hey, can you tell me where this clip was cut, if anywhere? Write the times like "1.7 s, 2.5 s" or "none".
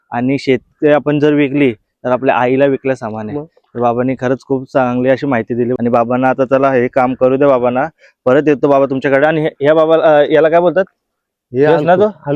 none